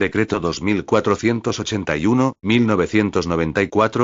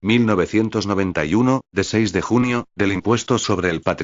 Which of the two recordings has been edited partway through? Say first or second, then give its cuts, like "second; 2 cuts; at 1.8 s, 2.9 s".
second; 1 cut; at 2.7 s